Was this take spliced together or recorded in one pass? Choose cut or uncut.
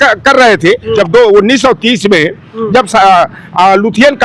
cut